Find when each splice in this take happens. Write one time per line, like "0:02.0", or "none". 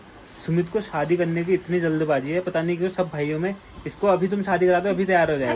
none